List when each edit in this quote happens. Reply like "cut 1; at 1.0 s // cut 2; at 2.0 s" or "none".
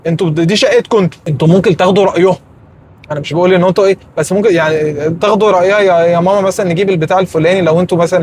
cut 1; at 1.2 s

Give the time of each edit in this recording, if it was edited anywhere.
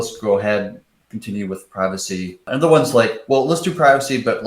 cut 1; at 2.5 s

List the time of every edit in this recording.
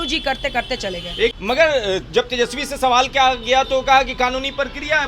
cut 1; at 1.3 s

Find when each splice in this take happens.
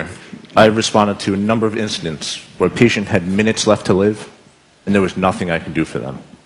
cut 1; at 3.5 s

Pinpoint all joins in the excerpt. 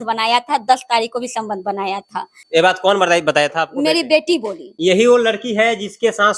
cut 1; at 2.4 s // cut 2; at 4.6 s

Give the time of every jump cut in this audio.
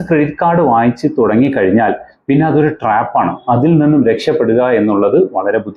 none

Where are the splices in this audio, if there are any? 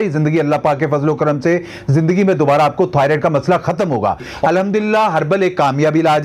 cut 1; at 4.3 s

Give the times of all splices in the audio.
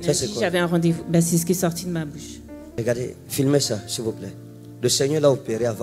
cut 1; at 2.6 s

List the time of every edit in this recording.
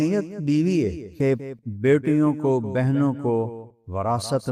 cut 1; at 1.3 s

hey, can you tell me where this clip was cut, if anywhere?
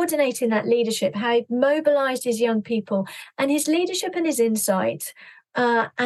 cut 1; at 3.2 s

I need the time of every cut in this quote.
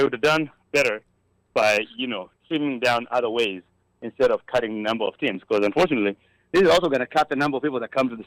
none

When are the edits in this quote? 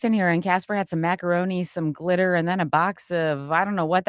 cut 1; at 1.6 s

